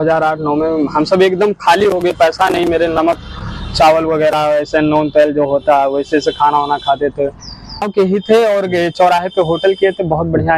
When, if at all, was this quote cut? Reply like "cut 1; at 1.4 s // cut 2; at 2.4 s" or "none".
cut 1; at 7.8 s